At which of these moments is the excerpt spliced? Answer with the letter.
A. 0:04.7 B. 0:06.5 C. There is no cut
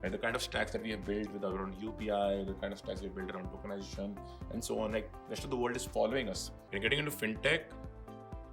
B